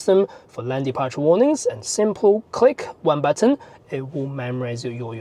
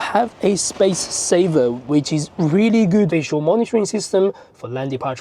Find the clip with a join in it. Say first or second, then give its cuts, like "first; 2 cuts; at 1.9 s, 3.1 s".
second; 1 cut; at 3.1 s